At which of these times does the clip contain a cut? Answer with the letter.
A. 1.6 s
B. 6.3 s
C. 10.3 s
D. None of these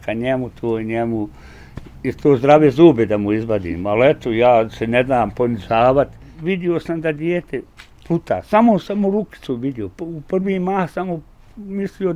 B